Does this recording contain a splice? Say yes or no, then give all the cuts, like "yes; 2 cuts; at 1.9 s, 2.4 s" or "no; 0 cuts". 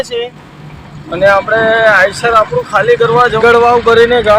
yes; 1 cut; at 3.4 s